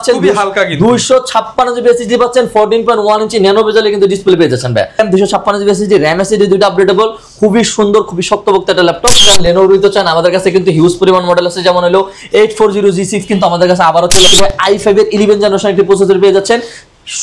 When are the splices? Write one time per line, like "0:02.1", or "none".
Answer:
0:05.0
0:09.3
0:14.2